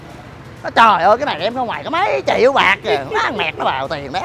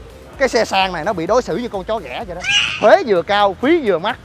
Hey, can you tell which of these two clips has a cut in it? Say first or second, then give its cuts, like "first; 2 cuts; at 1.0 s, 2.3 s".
second; 1 cut; at 2.7 s